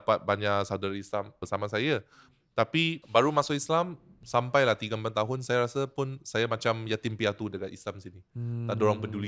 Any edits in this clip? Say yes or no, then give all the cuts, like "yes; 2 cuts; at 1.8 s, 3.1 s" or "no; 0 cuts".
yes; 2 cuts; at 1.4 s, 3.0 s